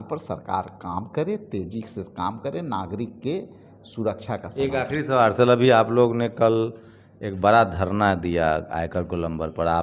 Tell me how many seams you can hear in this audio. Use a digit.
0